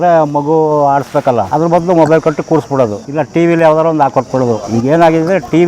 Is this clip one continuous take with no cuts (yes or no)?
no